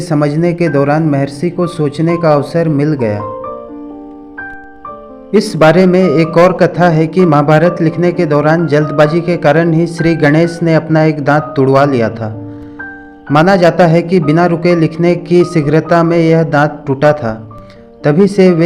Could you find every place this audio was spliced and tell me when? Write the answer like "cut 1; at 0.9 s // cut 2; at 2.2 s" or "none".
cut 1; at 3.2 s // cut 2; at 5.3 s